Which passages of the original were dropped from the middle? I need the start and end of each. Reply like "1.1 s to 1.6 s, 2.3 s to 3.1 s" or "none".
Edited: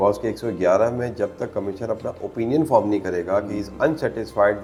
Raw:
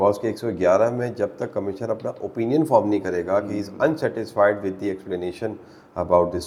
none